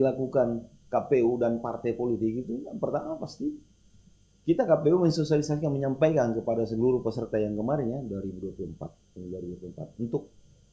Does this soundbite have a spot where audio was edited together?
no; 0 cuts

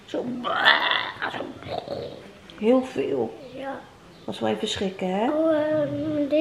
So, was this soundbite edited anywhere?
no; 0 cuts

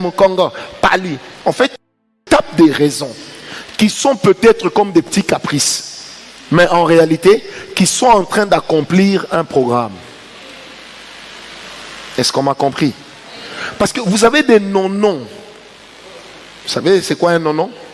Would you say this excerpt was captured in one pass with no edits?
yes; 0 cuts

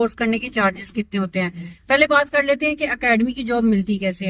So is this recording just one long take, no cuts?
yes; 0 cuts

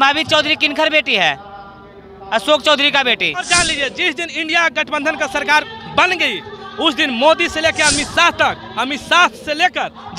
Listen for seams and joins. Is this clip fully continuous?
no; 1 cut; at 3.4 s

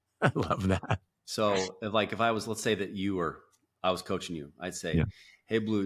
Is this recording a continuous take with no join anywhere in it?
yes; 0 cuts

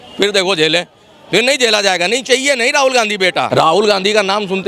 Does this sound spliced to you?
yes; 1 cut; at 3.5 s

